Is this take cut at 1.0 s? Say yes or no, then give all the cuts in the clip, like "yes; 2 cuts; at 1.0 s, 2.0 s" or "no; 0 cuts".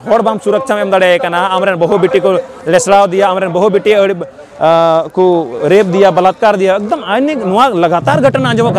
no; 0 cuts